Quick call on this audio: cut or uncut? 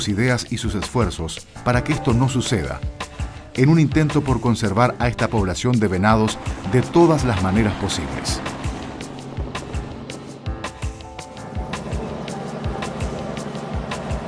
cut